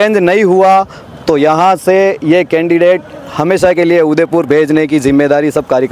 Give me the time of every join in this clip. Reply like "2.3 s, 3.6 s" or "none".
none